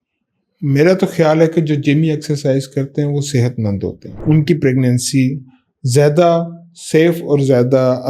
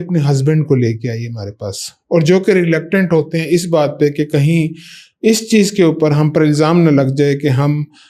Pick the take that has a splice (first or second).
first